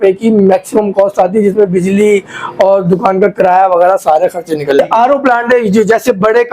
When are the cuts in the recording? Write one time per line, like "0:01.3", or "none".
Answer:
0:04.8